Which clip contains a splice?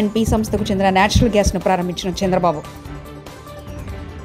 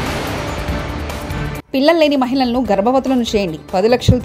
second; 1 cut; at 1.6 s

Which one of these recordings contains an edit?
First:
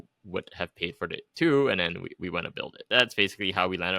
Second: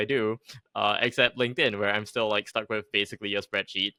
first; 1 cut; at 2.9 s

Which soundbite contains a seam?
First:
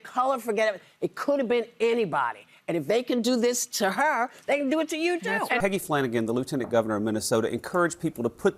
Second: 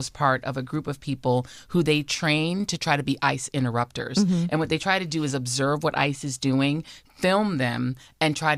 first; 1 cut; at 5.6 s

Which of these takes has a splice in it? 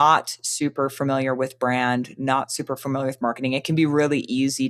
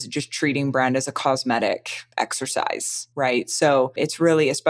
second; 3 cuts; at 2.0 s, 3.0 s, 4.0 s

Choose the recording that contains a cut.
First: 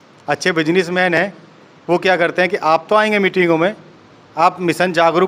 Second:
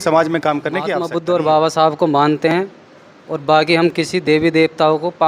second; 1 cut; at 1.0 s

